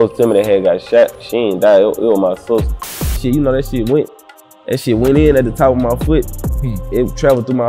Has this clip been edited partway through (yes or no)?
yes